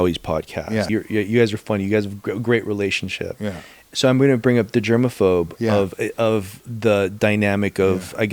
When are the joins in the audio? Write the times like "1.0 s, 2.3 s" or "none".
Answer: 0.9 s, 3.9 s